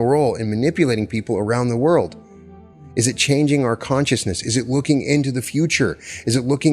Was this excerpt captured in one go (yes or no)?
yes